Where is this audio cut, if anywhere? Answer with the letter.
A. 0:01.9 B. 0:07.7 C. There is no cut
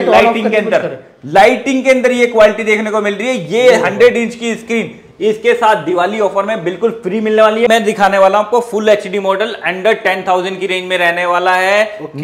B